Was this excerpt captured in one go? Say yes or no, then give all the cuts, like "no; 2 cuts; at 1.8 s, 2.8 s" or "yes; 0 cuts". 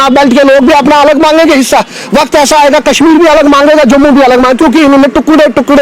yes; 0 cuts